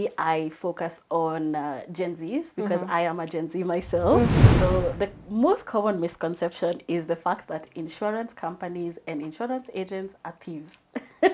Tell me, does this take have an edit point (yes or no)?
yes